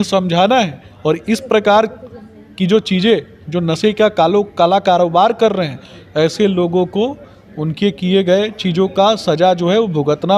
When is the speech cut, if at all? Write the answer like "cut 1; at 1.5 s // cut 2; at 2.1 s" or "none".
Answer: none